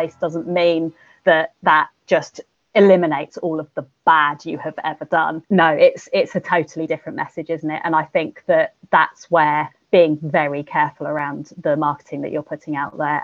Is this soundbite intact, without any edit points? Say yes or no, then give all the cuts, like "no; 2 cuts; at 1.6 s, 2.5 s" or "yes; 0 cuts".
no; 1 cut; at 5.4 s